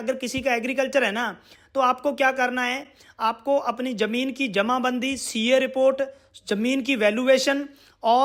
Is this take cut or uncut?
uncut